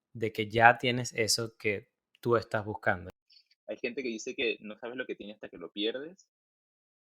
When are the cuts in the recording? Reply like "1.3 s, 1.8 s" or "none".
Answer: 3.1 s